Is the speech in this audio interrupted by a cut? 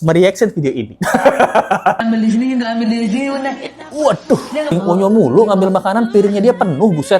yes; 2 cuts; at 2.0 s, 4.7 s

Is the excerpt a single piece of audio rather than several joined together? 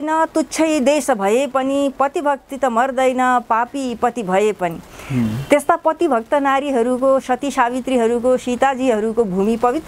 yes; 0 cuts

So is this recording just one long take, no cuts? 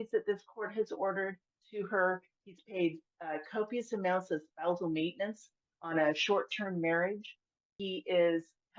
no; 2 cuts; at 1.6 s, 7.7 s

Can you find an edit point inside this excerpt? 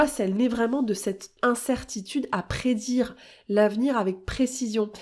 yes; 1 cut; at 1.3 s

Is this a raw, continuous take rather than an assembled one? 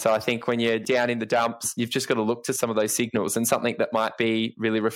no; 3 cuts; at 0.8 s, 1.6 s, 2.6 s

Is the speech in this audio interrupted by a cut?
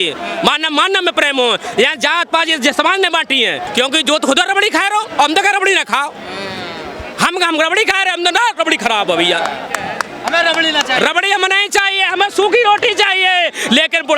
yes; 1 cut; at 3.6 s

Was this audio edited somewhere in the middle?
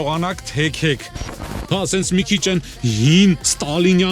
yes; 1 cut; at 1.3 s

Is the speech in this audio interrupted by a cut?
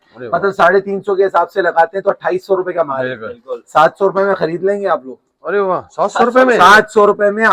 no; 0 cuts

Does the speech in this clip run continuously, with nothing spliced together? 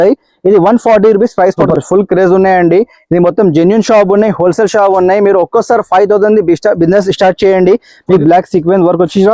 no; 2 cuts; at 1.6 s, 8.2 s

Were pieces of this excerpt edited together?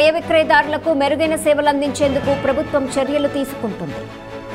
no; 0 cuts

